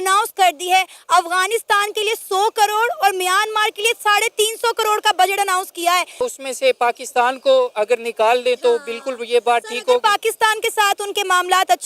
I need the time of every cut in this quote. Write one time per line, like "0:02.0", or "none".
0:06.2